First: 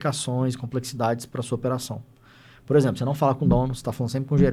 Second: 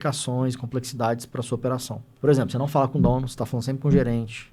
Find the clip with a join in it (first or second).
second